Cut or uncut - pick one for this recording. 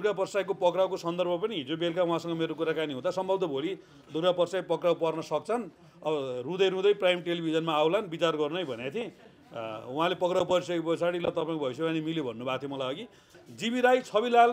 cut